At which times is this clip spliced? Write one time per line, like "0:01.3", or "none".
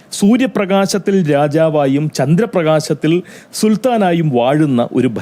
none

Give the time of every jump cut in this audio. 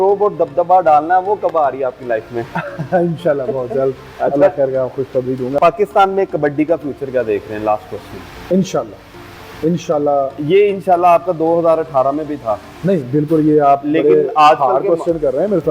0:05.6

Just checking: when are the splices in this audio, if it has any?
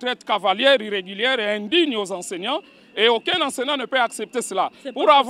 none

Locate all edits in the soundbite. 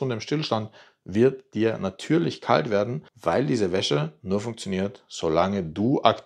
none

